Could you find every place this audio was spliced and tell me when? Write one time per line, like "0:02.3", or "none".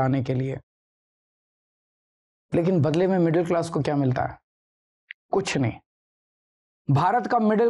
none